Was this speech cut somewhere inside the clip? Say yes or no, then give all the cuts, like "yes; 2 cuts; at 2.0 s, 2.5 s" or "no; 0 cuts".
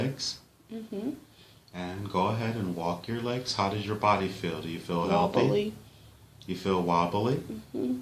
yes; 1 cut; at 1.3 s